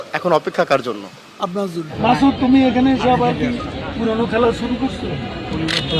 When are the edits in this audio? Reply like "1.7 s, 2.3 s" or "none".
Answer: 1.9 s